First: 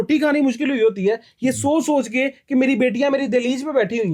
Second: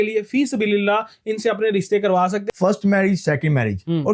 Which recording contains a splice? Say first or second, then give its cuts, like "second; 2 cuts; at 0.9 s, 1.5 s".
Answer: second; 1 cut; at 2.4 s